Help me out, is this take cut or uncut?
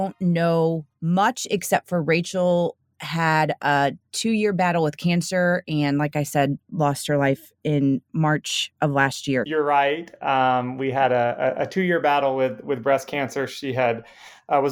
cut